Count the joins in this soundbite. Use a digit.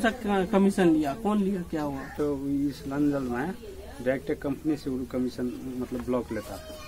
1